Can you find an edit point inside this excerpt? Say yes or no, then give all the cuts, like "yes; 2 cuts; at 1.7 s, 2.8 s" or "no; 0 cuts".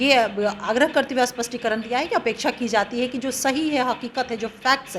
no; 0 cuts